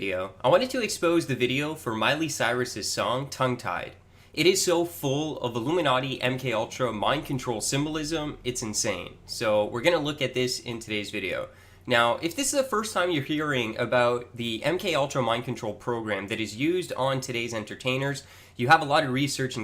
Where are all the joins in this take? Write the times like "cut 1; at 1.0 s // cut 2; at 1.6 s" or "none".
cut 1; at 1.8 s